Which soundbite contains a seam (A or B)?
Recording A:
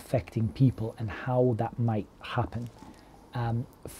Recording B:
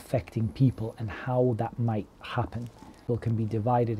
B